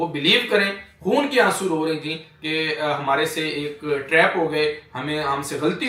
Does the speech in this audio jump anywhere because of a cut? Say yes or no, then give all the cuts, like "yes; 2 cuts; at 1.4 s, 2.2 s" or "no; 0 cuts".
no; 0 cuts